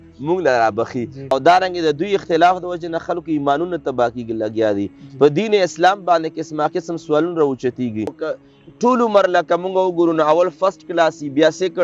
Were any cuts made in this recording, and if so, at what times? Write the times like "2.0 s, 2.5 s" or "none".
1.3 s, 8.2 s